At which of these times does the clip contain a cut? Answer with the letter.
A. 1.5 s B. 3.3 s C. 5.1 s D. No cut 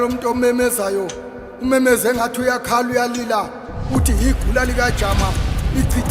D